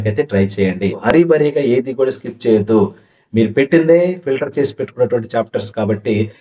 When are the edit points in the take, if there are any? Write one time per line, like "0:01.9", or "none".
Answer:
0:01.0